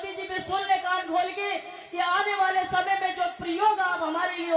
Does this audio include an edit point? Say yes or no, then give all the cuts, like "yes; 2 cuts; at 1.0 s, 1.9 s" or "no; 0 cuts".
no; 0 cuts